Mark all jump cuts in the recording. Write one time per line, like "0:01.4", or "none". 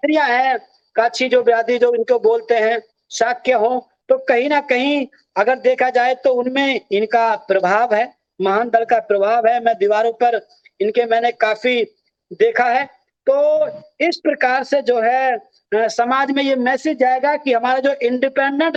none